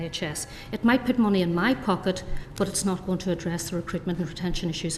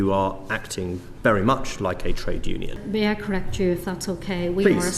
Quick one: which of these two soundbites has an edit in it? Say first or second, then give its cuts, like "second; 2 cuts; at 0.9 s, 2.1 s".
second; 1 cut; at 2.8 s